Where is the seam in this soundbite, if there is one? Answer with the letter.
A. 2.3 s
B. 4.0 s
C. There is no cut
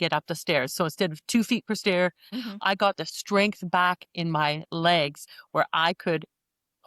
A